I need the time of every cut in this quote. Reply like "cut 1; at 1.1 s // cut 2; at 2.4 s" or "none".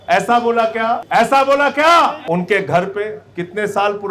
cut 1; at 1.0 s // cut 2; at 2.2 s